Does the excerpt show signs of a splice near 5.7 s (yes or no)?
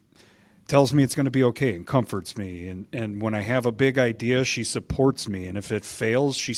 no